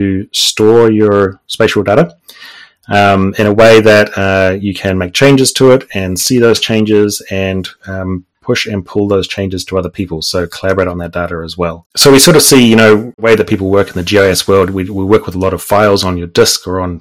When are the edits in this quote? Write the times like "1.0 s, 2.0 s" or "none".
11.9 s, 13.2 s